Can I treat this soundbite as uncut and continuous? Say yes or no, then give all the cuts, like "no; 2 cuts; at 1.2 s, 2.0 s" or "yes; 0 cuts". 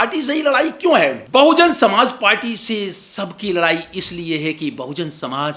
no; 1 cut; at 1.2 s